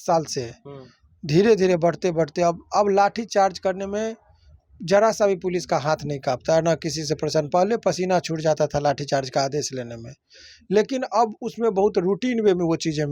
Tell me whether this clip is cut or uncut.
uncut